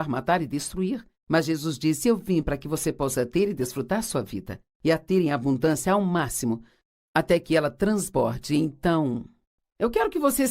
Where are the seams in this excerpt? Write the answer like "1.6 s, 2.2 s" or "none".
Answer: 6.1 s